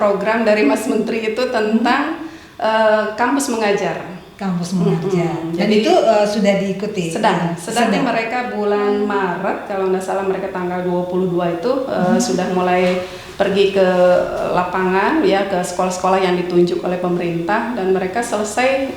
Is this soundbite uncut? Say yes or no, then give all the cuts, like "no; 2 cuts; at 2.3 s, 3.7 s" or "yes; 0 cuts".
yes; 0 cuts